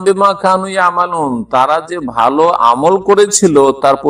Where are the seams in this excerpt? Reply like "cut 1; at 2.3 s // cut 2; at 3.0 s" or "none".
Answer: none